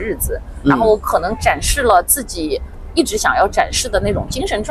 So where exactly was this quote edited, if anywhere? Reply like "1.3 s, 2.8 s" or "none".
none